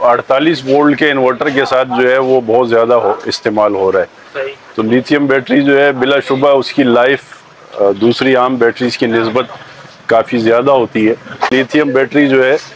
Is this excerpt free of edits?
no; 1 cut; at 11.5 s

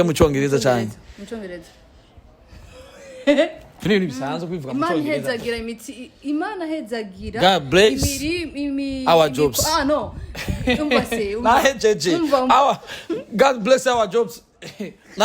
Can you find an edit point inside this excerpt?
yes; 1 cut; at 3.8 s

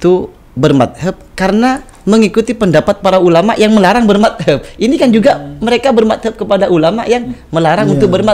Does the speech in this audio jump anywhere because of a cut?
no; 0 cuts

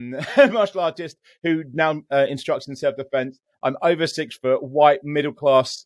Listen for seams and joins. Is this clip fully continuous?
yes; 0 cuts

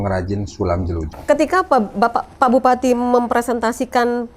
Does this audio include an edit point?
yes; 1 cut; at 1.1 s

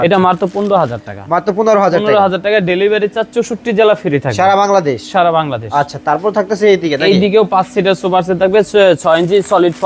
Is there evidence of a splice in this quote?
no; 0 cuts

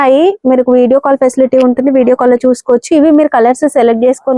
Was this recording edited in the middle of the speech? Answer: no; 0 cuts

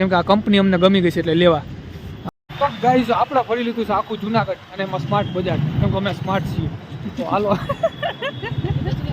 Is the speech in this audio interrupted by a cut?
yes; 1 cut; at 2.2 s

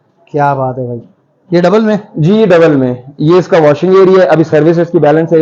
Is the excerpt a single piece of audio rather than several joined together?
yes; 0 cuts

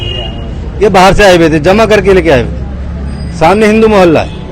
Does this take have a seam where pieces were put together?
no; 0 cuts

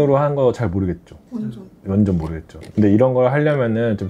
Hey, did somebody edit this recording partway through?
no; 0 cuts

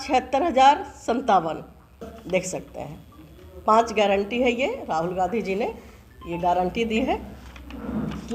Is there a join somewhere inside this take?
yes; 1 cut; at 2.1 s

